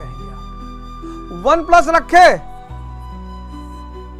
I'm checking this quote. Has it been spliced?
no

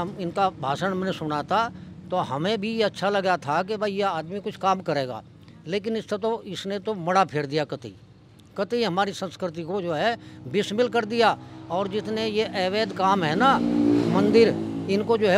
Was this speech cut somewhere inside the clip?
no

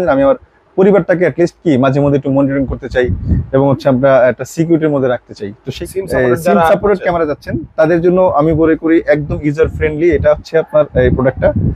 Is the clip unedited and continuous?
no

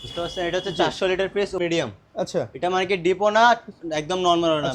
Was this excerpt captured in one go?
no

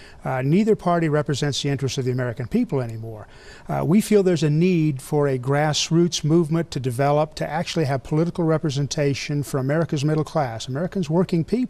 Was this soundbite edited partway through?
yes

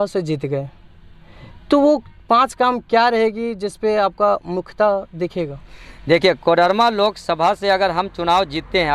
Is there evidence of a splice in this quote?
no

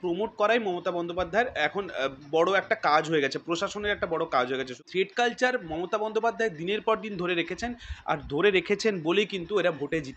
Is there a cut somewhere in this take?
yes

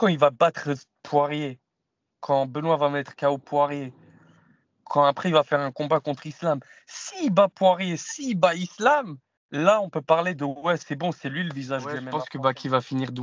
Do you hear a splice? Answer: yes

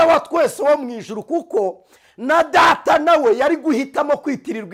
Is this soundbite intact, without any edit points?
yes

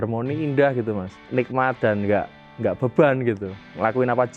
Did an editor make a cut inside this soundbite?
yes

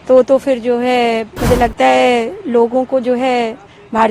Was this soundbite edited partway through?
yes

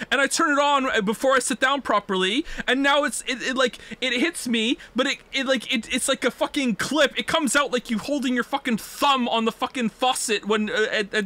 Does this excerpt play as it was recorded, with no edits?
yes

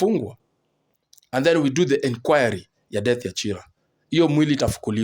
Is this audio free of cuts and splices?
yes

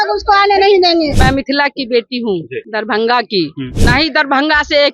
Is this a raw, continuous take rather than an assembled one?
no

